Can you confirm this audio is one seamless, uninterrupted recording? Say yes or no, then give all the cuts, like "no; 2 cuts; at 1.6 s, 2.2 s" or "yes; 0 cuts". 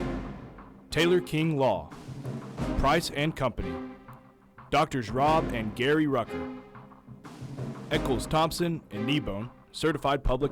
no; 1 cut; at 0.9 s